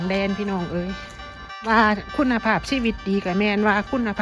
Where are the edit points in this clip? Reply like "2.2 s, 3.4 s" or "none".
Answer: 1.7 s